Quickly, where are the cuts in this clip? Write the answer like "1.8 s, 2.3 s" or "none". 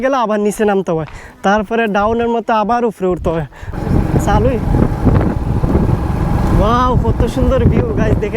3.7 s